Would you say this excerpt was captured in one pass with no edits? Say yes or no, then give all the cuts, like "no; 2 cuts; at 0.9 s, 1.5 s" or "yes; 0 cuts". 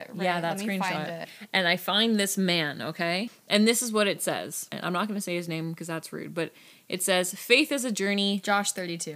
no; 3 cuts; at 1.4 s, 3.4 s, 4.7 s